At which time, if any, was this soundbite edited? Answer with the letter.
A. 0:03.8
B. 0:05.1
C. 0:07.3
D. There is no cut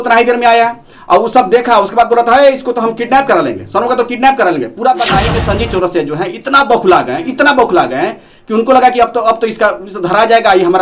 B